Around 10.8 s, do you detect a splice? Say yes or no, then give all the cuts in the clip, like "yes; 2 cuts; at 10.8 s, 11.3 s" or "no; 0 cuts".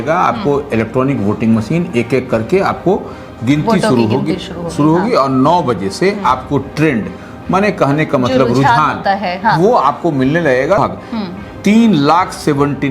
yes; 1 cut; at 10.8 s